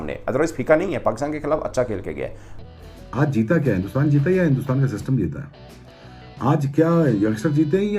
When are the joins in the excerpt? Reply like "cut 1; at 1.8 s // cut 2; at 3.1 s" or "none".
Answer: cut 1; at 2.5 s